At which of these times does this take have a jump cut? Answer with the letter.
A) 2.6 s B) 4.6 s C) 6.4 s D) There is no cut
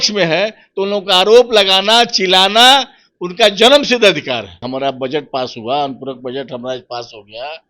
B